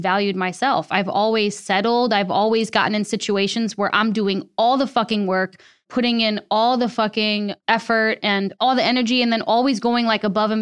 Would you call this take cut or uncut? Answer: cut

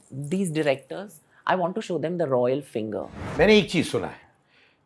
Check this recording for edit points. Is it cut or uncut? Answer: cut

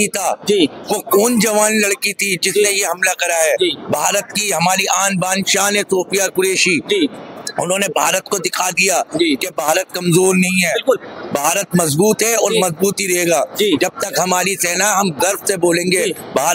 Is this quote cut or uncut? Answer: uncut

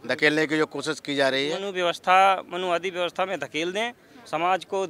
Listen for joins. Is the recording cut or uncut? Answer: cut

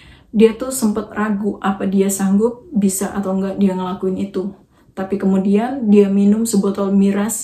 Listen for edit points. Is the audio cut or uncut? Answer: uncut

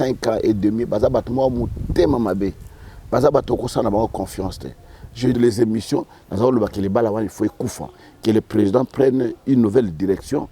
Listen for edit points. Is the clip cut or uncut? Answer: cut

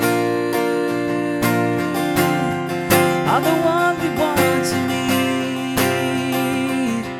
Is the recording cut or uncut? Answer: uncut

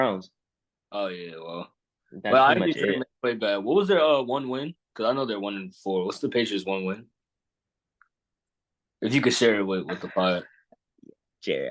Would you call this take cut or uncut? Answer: uncut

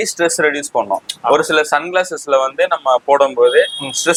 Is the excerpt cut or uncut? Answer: uncut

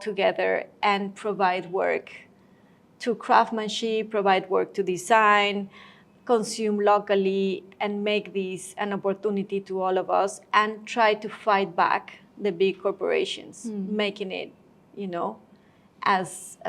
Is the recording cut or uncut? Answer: uncut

